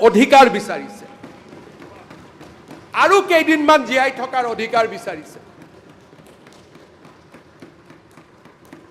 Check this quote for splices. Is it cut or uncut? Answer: uncut